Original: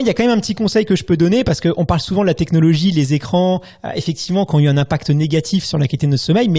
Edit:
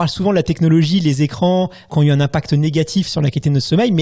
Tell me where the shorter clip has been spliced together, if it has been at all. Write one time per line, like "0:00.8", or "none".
0:01.9